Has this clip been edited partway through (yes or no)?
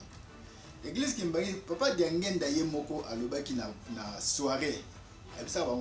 no